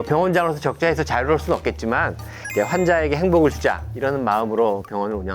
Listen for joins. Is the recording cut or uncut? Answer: uncut